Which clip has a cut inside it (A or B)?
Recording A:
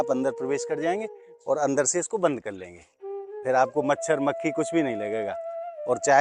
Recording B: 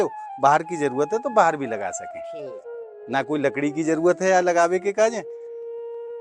B